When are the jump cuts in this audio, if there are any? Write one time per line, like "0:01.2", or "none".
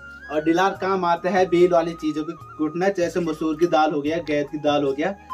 none